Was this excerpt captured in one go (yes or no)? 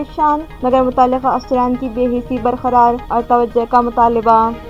yes